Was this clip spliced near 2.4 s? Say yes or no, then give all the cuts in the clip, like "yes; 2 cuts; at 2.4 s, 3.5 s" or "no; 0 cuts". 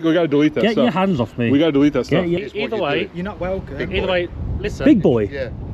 yes; 1 cut; at 2.4 s